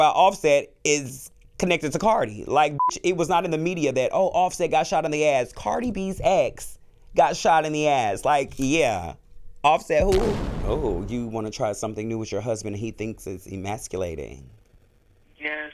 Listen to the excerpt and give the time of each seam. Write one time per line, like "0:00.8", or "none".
0:10.5